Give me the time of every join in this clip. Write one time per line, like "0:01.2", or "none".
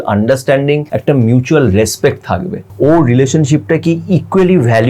0:00.9
0:02.7